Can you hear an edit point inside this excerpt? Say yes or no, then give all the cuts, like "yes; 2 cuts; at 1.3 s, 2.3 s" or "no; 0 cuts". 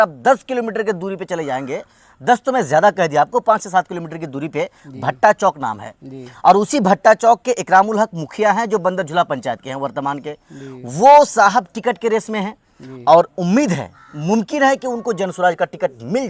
no; 0 cuts